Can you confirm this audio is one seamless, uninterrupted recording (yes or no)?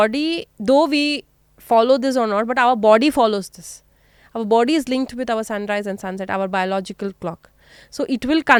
yes